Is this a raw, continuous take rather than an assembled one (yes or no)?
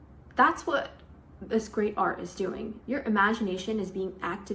no